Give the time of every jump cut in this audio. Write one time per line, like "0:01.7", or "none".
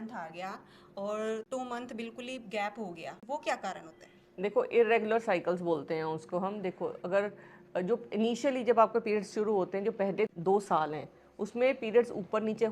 0:01.5
0:03.2
0:10.3